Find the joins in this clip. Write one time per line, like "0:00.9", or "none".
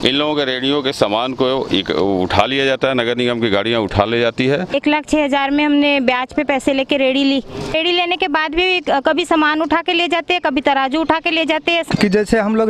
0:04.7
0:07.5
0:11.8